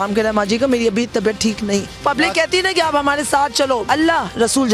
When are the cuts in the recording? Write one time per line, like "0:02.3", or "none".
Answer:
0:01.9
0:03.8